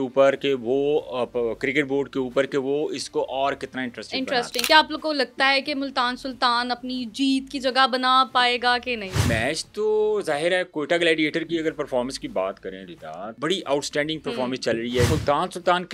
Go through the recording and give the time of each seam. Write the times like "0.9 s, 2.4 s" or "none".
4.6 s, 9.2 s, 13.3 s, 15.1 s